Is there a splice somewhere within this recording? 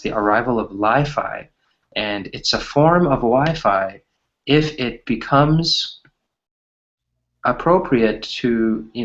yes; 1 cut; at 1.3 s

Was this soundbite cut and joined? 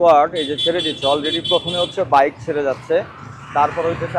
no; 0 cuts

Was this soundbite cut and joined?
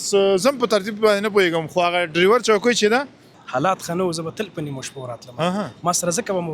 yes; 1 cut; at 3.4 s

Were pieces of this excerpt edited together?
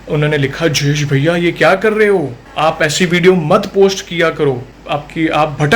yes; 1 cut; at 4.7 s

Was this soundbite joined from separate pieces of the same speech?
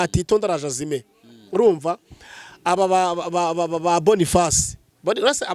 no; 0 cuts

